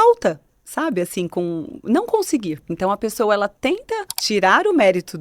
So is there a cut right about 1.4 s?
no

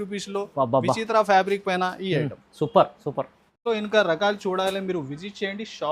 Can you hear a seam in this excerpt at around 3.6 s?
yes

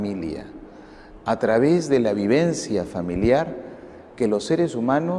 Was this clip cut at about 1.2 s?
no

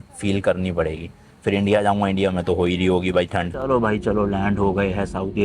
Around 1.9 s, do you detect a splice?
no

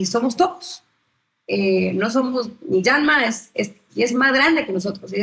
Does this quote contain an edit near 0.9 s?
no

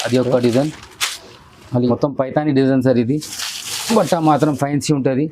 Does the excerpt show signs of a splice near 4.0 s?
no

